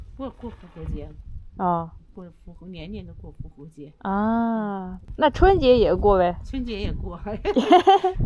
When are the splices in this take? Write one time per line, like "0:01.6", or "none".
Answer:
0:04.9